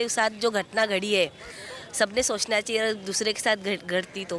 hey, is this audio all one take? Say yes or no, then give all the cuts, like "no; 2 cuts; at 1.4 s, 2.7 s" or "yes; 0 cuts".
yes; 0 cuts